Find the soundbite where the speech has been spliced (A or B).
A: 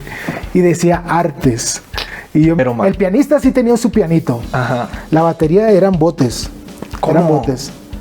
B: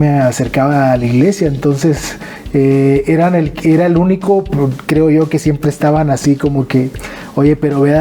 A